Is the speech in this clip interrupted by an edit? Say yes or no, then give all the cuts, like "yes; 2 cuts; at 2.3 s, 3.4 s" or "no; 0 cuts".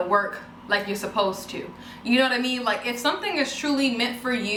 no; 0 cuts